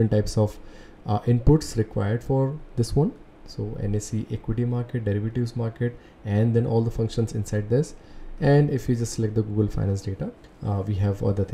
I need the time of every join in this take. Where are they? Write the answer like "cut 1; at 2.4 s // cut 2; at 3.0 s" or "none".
cut 1; at 10.5 s

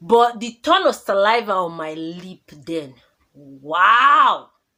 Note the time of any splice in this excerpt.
none

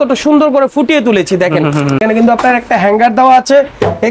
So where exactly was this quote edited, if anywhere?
cut 1; at 2.0 s

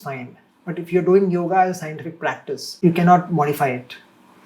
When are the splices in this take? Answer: cut 1; at 2.7 s

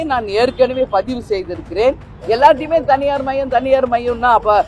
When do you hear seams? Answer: cut 1; at 2.1 s

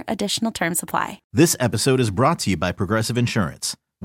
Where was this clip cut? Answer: cut 1; at 1.2 s

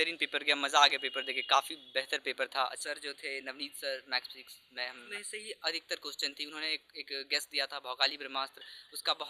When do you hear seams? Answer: cut 1; at 2.8 s // cut 2; at 5.0 s

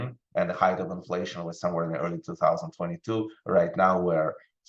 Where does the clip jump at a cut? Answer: none

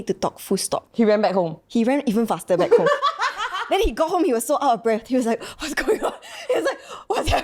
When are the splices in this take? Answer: none

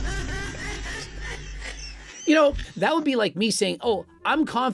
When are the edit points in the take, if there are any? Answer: cut 1; at 2.7 s

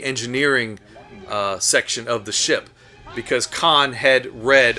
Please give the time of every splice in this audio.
none

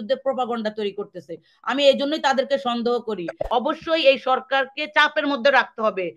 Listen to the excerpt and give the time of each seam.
cut 1; at 3.4 s

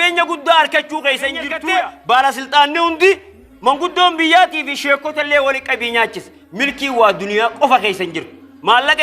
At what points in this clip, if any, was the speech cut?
cut 1; at 1.5 s

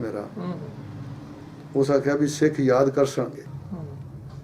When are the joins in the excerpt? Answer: cut 1; at 3.5 s

